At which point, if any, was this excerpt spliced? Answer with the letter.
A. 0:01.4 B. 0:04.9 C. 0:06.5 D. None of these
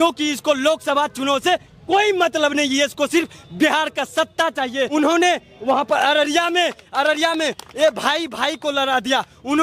B